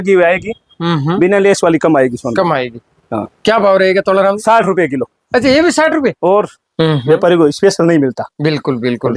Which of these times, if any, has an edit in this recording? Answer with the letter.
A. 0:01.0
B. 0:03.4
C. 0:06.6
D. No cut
C